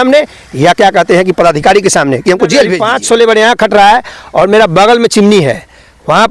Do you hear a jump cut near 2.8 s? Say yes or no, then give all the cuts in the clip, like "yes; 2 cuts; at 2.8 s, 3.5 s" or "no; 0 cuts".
yes; 1 cut; at 2.8 s